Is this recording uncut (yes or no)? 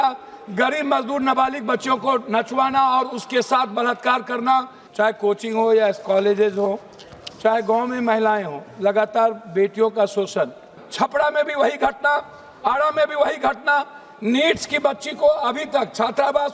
no